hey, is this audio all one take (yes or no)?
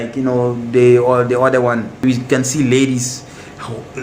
no